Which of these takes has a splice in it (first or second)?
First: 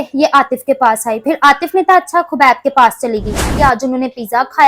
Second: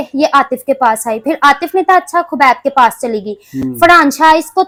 first